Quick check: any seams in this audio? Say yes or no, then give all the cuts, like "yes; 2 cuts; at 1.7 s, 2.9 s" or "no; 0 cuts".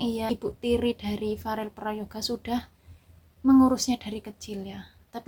no; 0 cuts